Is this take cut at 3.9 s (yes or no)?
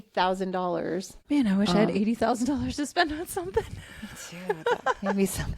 no